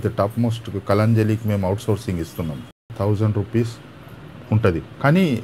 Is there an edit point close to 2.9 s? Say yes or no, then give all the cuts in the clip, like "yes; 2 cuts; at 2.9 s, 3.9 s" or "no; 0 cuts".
yes; 1 cut; at 2.9 s